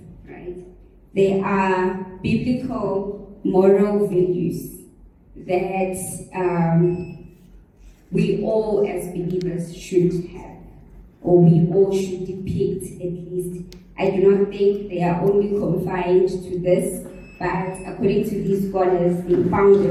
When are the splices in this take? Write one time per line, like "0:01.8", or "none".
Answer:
none